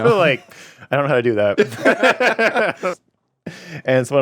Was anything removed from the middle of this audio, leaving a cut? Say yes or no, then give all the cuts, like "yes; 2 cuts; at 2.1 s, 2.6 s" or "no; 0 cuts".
yes; 1 cut; at 3.0 s